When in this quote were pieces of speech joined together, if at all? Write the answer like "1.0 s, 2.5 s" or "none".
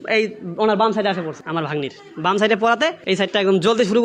1.4 s, 3.0 s